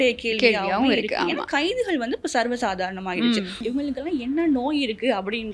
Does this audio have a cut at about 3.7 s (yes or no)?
yes